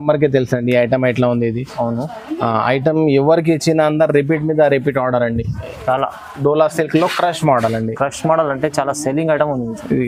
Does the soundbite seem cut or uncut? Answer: uncut